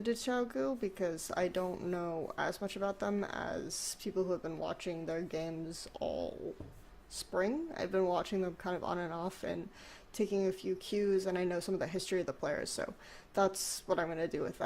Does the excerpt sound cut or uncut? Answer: cut